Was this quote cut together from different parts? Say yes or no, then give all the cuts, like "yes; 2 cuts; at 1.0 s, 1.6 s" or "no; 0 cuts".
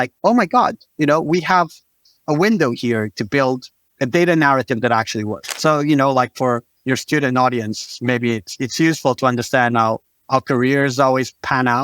yes; 2 cuts; at 5.4 s, 6.7 s